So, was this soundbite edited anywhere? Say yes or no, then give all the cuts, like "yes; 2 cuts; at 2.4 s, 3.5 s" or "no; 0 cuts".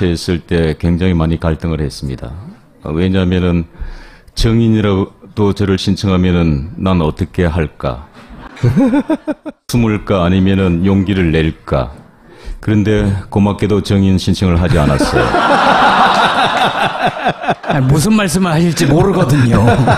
yes; 1 cut; at 5.7 s